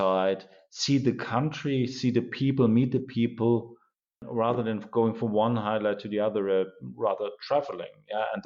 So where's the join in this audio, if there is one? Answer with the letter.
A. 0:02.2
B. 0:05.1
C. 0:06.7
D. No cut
D